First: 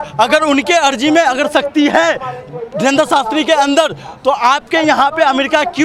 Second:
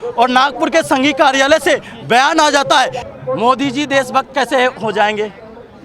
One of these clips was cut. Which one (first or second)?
second